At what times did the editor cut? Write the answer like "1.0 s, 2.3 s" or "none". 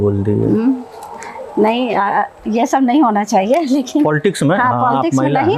none